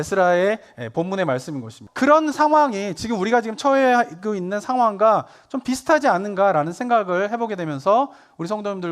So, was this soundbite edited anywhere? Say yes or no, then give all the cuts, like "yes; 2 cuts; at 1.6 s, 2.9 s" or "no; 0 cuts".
yes; 1 cut; at 1.8 s